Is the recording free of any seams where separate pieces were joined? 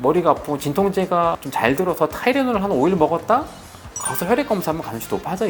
yes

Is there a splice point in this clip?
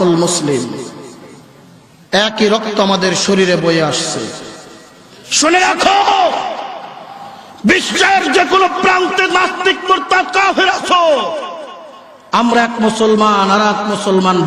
no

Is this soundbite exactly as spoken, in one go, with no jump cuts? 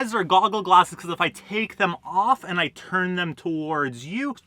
yes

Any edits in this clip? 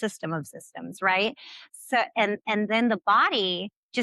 no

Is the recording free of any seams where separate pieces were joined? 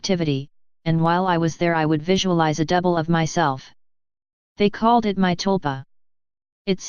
no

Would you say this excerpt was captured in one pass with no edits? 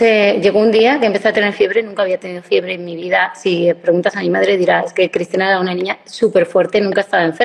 yes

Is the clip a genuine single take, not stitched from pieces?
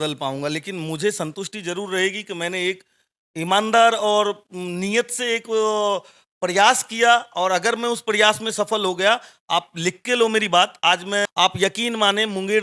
no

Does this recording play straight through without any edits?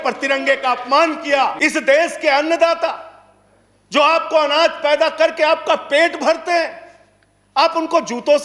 no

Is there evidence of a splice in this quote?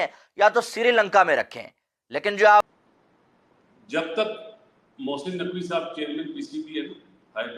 yes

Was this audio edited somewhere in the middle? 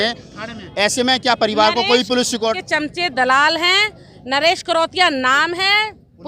yes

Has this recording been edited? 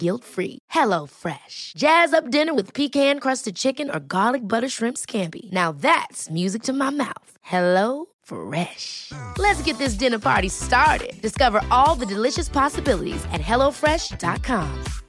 no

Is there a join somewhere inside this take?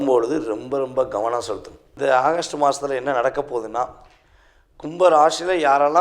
yes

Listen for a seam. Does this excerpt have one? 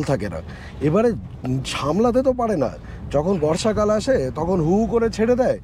no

